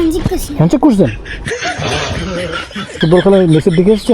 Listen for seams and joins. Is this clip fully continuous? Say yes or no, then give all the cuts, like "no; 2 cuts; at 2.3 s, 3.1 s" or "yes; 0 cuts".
no; 1 cut; at 3.0 s